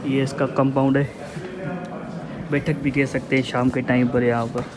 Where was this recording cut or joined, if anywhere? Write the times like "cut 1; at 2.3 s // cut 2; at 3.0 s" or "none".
none